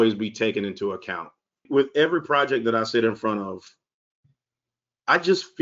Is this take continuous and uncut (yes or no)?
no